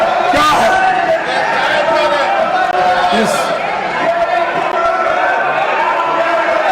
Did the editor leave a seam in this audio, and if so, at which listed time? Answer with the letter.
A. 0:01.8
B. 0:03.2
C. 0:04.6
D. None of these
D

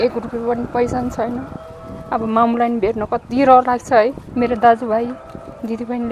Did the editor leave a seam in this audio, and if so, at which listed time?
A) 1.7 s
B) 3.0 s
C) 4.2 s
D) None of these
C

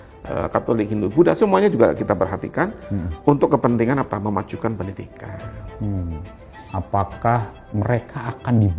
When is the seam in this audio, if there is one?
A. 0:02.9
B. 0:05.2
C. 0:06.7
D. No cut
C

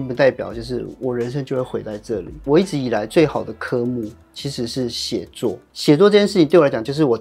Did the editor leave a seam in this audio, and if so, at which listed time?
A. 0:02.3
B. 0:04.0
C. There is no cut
C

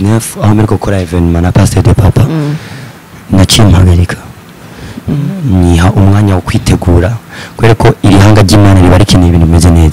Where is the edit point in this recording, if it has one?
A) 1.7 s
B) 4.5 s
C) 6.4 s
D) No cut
D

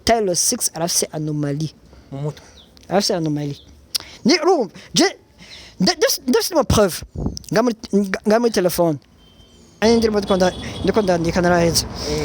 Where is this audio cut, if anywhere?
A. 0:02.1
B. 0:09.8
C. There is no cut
B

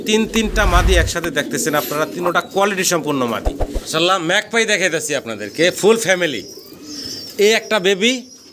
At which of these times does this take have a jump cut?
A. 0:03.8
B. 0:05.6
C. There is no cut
A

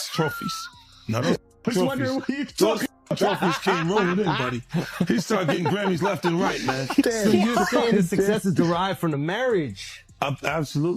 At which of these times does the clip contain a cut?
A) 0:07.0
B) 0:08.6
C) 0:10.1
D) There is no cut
A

